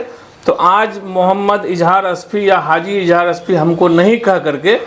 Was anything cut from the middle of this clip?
no; 0 cuts

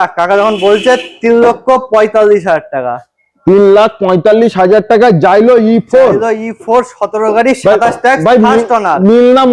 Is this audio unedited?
yes; 0 cuts

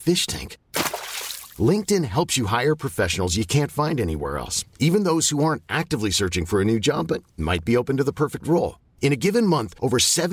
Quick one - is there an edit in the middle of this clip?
no; 0 cuts

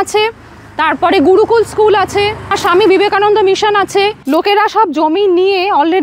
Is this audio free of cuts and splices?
no; 2 cuts; at 2.6 s, 4.2 s

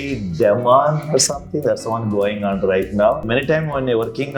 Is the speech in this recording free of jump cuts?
no; 1 cut; at 3.3 s

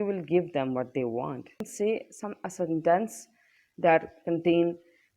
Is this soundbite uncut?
no; 1 cut; at 1.6 s

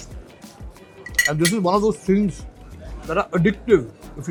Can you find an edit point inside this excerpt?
no; 0 cuts

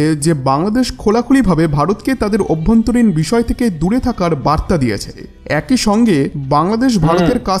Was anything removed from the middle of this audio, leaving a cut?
yes; 1 cut; at 5.1 s

